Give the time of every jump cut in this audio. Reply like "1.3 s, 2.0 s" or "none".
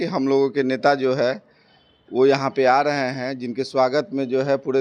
none